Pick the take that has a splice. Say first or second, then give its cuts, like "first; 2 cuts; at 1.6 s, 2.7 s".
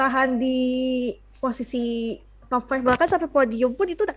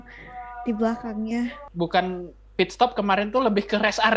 second; 1 cut; at 1.6 s